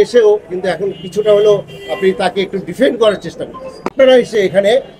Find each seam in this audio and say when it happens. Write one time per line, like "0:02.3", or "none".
0:03.9

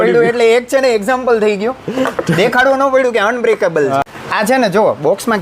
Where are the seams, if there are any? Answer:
0:04.2

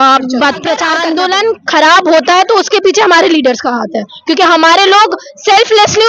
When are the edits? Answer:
0:01.0

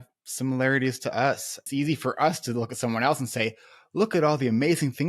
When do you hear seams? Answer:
0:01.5

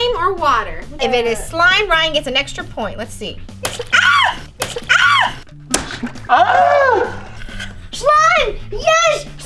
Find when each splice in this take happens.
0:00.9
0:03.4

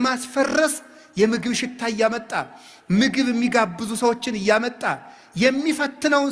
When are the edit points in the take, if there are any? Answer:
none

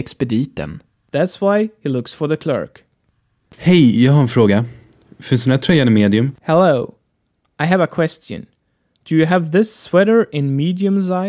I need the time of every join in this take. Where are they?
none

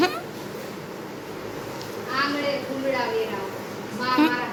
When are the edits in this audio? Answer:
none

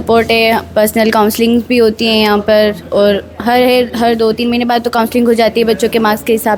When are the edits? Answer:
none

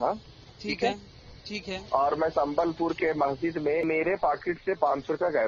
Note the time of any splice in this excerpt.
0:03.8

